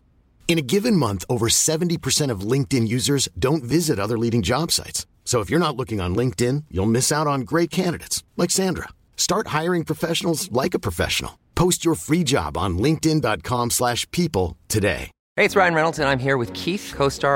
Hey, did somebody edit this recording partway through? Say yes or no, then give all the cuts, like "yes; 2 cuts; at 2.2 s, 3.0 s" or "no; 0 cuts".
yes; 1 cut; at 15.2 s